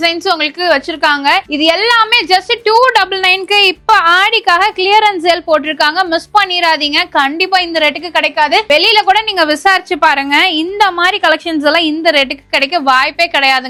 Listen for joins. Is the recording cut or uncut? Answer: uncut